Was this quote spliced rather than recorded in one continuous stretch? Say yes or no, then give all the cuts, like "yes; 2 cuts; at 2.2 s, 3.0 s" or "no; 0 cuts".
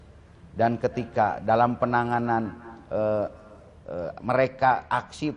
yes; 1 cut; at 1.8 s